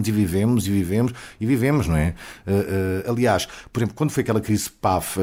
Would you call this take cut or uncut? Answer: uncut